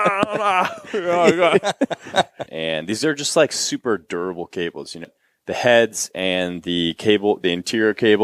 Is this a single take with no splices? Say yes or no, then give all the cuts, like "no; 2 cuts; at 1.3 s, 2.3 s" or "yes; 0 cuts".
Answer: no; 2 cuts; at 2.4 s, 5.1 s